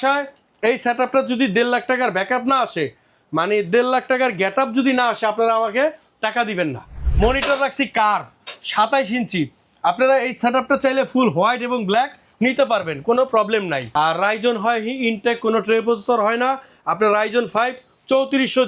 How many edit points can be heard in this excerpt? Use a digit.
2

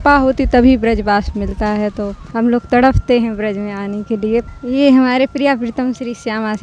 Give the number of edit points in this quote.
2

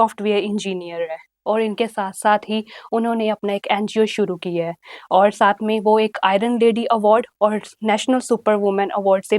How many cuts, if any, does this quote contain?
0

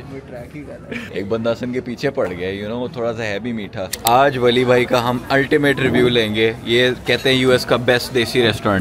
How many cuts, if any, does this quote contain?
2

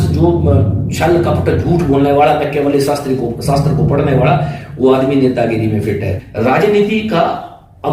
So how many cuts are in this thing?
1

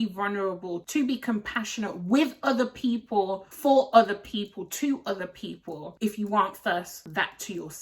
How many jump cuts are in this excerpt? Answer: 3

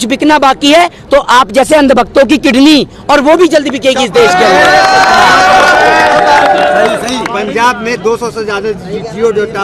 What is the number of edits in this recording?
0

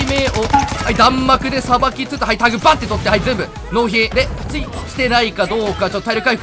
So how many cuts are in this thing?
0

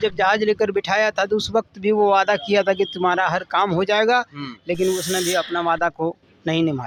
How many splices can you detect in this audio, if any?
0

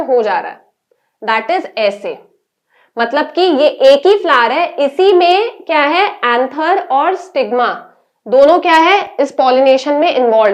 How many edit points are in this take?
0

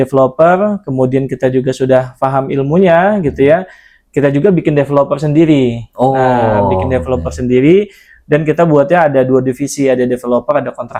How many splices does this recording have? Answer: 0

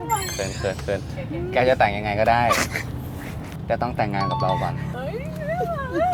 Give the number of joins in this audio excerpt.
1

